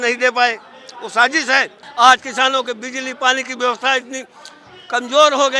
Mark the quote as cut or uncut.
cut